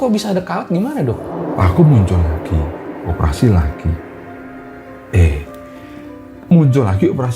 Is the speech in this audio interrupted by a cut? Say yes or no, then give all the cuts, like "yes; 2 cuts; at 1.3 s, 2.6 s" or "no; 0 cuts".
yes; 1 cut; at 1.3 s